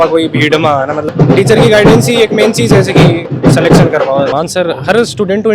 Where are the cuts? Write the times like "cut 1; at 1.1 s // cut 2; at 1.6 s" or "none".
cut 1; at 1.1 s // cut 2; at 4.3 s